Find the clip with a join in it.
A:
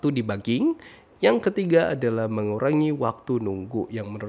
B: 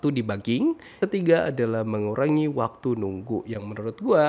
B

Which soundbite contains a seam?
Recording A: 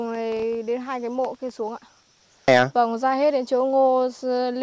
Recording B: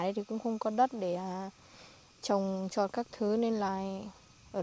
A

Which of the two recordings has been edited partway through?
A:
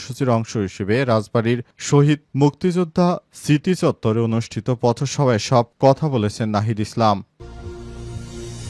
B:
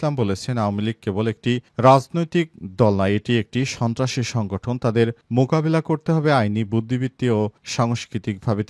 A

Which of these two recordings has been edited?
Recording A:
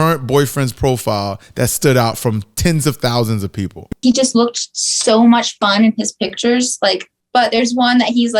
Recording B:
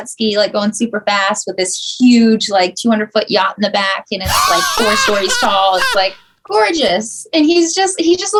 A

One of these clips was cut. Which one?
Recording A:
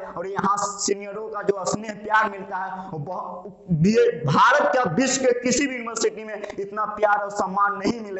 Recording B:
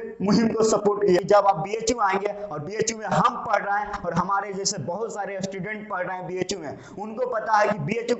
B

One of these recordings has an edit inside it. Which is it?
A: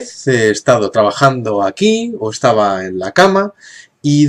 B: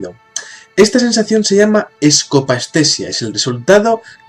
B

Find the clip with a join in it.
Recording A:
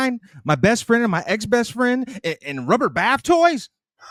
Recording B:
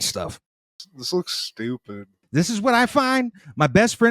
B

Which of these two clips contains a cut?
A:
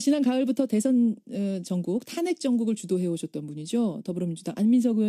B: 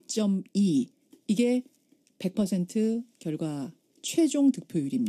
B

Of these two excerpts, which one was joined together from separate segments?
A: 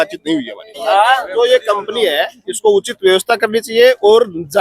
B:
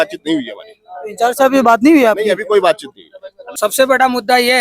A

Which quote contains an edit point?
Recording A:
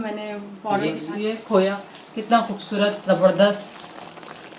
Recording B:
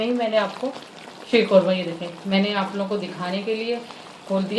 A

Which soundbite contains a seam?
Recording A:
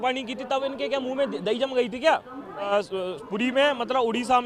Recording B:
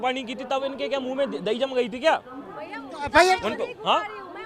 A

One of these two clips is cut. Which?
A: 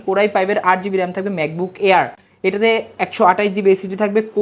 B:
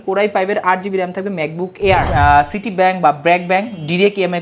B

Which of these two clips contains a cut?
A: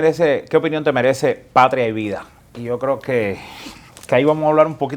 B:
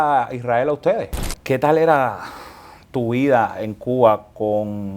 B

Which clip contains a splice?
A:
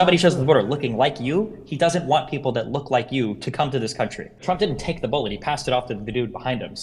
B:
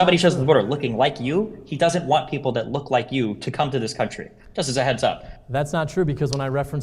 A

